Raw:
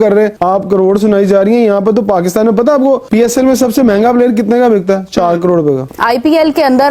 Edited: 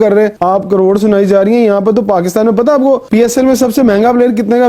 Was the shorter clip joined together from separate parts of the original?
no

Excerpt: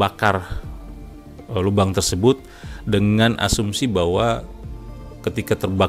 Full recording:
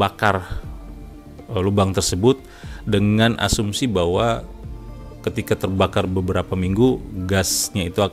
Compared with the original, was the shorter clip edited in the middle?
no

